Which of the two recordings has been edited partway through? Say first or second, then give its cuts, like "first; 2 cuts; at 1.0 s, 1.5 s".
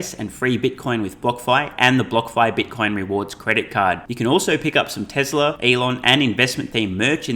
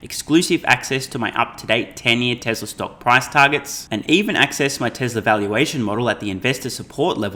first; 1 cut; at 5.6 s